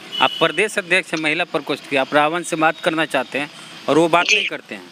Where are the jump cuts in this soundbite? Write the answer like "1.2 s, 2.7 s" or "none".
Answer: none